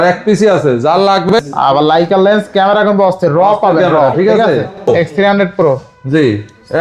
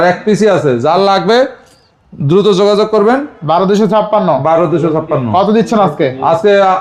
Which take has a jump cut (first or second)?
first